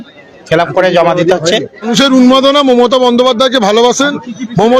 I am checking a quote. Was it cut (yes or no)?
yes